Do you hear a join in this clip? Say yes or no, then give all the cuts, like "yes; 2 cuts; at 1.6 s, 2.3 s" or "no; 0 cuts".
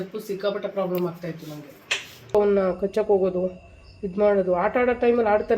yes; 1 cut; at 2.3 s